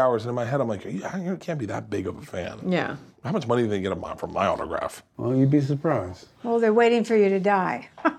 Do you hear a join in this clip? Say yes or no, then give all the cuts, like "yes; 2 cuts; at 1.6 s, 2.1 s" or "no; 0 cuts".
yes; 1 cut; at 5.0 s